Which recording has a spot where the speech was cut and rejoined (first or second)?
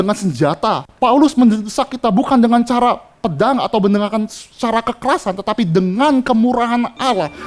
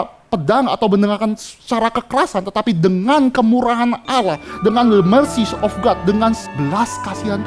second